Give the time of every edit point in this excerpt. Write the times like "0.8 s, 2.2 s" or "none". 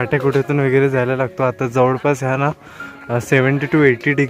none